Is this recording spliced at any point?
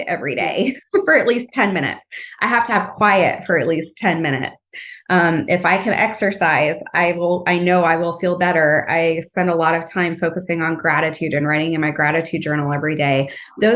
no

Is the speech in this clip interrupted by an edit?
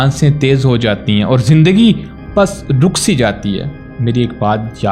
no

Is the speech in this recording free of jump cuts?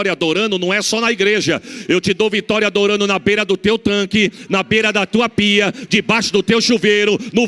yes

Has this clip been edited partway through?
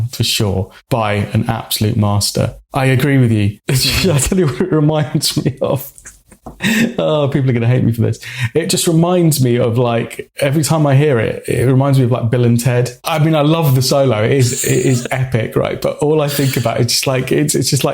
yes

